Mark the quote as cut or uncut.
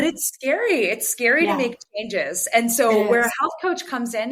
uncut